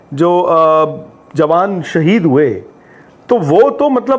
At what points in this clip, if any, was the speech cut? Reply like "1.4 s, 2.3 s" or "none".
none